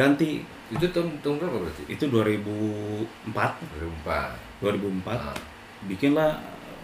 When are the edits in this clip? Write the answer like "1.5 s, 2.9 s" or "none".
3.2 s, 5.8 s